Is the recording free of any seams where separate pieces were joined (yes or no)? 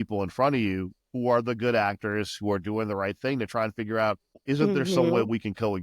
no